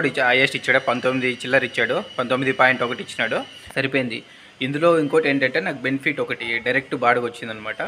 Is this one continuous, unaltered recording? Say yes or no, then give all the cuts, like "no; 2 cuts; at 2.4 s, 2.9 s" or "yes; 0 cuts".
no; 1 cut; at 3.6 s